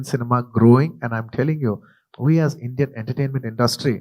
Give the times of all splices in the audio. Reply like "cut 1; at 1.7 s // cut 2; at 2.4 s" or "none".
cut 1; at 2.0 s